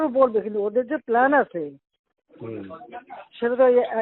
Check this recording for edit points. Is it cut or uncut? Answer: uncut